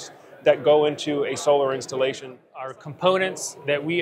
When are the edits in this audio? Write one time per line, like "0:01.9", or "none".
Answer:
0:02.7